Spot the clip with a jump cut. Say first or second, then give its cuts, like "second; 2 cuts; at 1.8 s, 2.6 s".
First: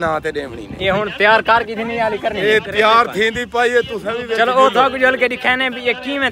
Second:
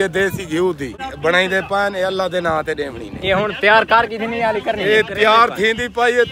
second; 1 cut; at 1.1 s